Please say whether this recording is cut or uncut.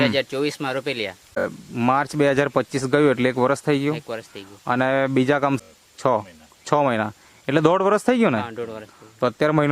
cut